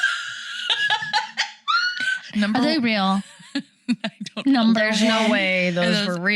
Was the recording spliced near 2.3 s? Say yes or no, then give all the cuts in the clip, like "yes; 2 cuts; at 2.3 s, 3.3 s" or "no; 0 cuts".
yes; 1 cut; at 2.3 s